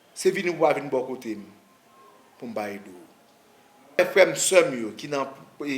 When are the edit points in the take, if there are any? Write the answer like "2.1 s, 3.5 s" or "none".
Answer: 4.0 s

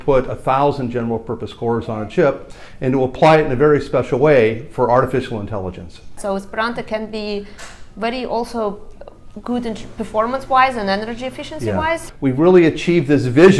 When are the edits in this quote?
6.2 s, 12.1 s

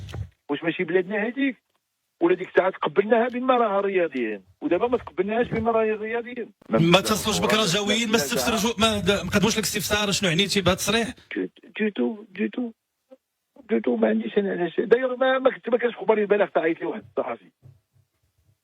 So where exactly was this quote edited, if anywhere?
6.5 s

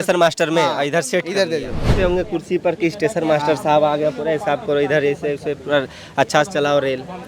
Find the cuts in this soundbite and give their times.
1.9 s

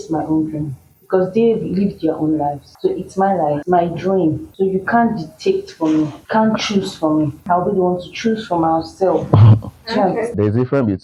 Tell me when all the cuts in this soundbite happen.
2.7 s, 3.6 s, 4.5 s, 6.2 s, 7.4 s, 10.3 s

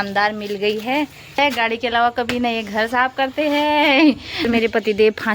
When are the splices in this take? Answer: 1.4 s, 4.5 s

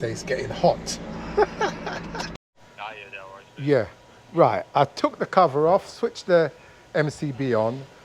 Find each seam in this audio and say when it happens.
2.4 s

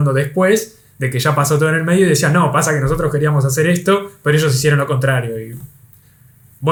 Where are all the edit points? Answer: none

